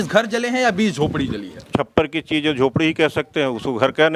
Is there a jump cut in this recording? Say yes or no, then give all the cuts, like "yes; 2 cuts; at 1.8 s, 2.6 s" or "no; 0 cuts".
yes; 1 cut; at 1.7 s